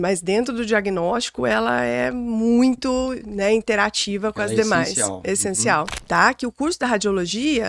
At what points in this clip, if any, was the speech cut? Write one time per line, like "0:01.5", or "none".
0:06.0

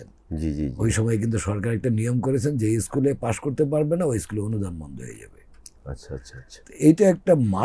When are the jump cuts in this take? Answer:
none

